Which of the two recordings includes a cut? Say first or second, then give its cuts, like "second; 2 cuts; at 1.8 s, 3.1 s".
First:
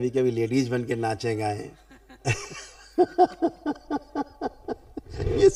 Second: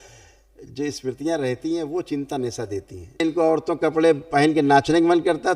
second; 1 cut; at 3.2 s